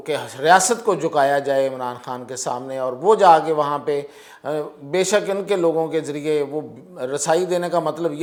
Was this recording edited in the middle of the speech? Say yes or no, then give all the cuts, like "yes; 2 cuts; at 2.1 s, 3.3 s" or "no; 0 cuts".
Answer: no; 0 cuts